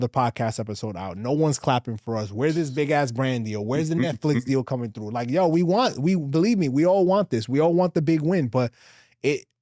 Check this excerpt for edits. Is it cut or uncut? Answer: uncut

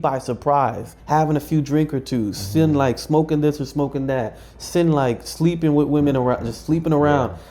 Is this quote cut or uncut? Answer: cut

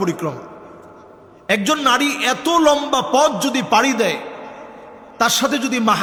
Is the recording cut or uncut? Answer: uncut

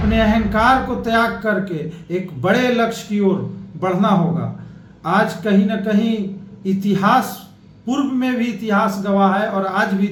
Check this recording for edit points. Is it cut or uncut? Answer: uncut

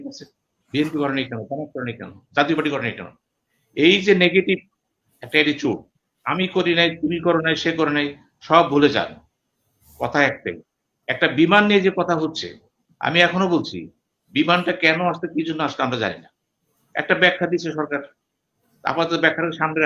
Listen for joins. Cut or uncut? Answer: uncut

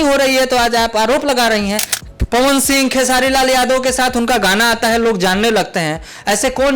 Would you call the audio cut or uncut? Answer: cut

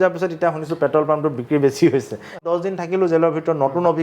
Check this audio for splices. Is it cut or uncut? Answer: cut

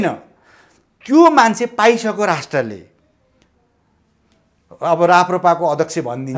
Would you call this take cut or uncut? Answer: uncut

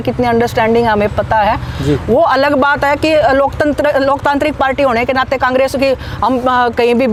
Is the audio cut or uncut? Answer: uncut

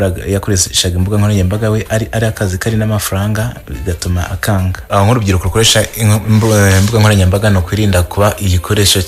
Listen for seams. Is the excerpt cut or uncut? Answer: cut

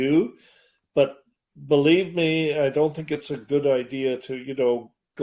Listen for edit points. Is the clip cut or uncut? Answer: uncut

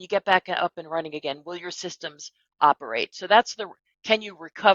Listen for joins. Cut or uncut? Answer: uncut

